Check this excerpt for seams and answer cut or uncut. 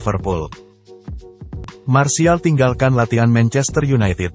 cut